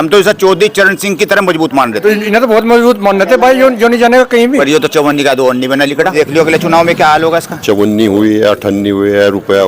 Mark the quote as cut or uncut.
cut